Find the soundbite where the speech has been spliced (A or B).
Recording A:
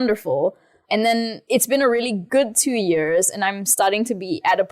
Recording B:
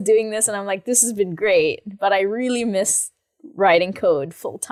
A